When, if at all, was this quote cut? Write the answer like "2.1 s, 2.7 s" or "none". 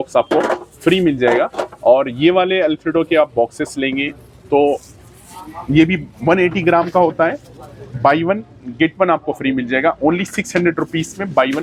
none